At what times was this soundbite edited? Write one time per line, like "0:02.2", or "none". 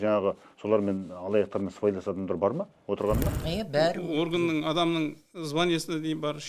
0:03.4

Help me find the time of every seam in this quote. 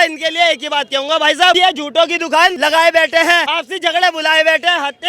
0:01.6
0:02.6
0:03.5

